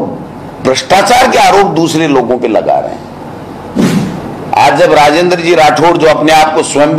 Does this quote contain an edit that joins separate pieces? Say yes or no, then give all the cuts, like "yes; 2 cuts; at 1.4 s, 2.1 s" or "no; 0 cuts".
yes; 1 cut; at 3.8 s